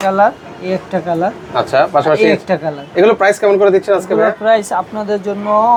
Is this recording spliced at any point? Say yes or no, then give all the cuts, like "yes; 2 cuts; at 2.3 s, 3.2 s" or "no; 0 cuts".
no; 0 cuts